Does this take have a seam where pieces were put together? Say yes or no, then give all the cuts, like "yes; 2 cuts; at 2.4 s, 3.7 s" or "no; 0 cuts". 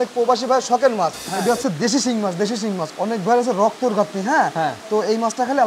yes; 2 cuts; at 1.3 s, 2.9 s